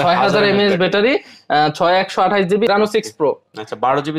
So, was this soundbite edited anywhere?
yes; 1 cut; at 2.7 s

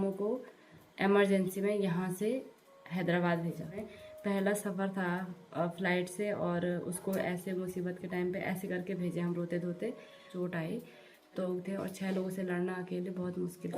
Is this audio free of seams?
no; 3 cuts; at 3.9 s, 10.3 s, 11.4 s

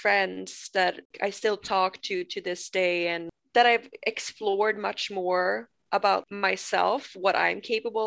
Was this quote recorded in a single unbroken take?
no; 3 cuts; at 1.1 s, 3.3 s, 6.2 s

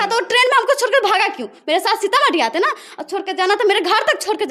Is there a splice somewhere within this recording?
no; 0 cuts

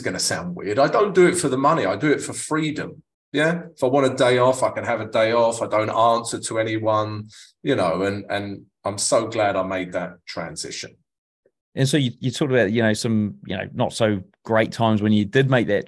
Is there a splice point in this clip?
no; 0 cuts

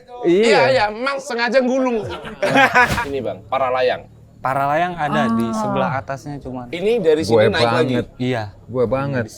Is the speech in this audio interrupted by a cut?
yes; 3 cuts; at 1.2 s, 2.3 s, 3.0 s

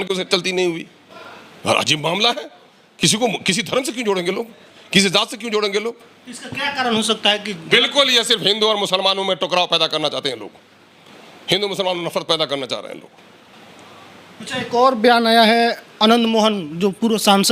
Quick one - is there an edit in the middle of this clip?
no; 0 cuts

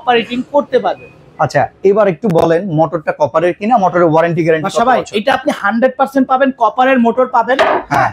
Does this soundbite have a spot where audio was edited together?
no; 0 cuts

